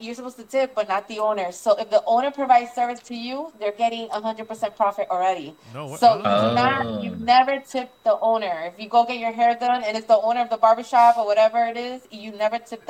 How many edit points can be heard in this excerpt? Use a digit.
0